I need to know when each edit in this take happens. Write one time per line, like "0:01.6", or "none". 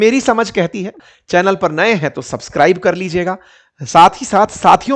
0:01.0